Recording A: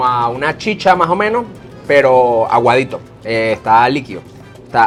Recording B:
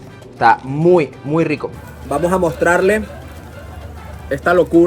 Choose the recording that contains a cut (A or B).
B